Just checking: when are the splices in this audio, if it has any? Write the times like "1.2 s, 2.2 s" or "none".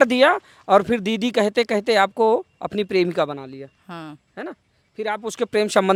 none